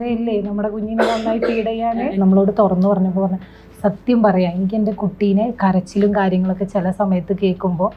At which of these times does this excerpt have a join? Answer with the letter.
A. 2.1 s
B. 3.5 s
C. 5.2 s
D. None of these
A